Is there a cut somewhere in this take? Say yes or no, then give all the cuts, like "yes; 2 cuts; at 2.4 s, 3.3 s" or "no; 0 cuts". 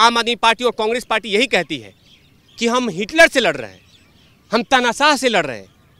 no; 0 cuts